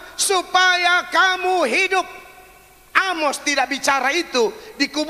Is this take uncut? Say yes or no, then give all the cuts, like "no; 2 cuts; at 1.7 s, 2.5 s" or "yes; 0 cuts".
yes; 0 cuts